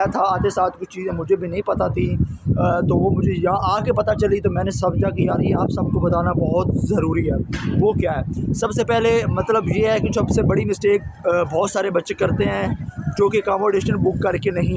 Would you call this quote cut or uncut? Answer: uncut